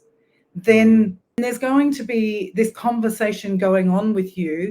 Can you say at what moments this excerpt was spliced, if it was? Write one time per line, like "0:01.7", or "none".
0:01.3